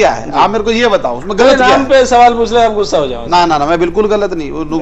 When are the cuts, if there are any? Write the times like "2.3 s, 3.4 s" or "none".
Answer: none